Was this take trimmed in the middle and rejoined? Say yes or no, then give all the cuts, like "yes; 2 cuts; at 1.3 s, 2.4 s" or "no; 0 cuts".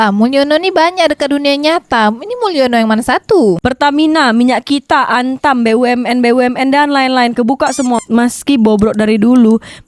yes; 1 cut; at 3.6 s